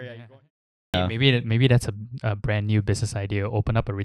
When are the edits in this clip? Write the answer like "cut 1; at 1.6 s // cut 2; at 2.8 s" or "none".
cut 1; at 0.9 s